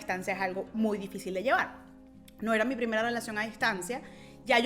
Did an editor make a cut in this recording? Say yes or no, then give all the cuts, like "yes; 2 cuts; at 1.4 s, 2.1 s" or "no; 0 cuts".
no; 0 cuts